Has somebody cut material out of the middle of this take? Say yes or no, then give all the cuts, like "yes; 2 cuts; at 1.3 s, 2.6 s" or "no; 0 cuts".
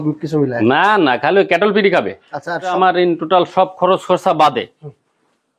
yes; 1 cut; at 2.7 s